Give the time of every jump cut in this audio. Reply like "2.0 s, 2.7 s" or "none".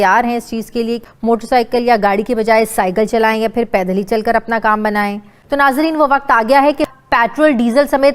1.0 s, 5.3 s, 6.8 s